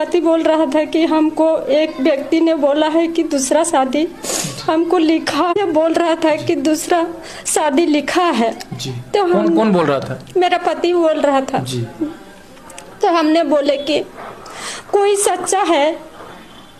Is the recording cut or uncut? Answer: uncut